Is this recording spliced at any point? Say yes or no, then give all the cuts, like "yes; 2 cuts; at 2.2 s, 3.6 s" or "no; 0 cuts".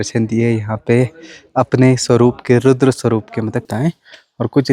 yes; 1 cut; at 3.7 s